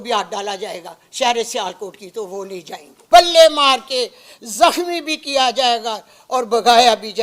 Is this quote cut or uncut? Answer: cut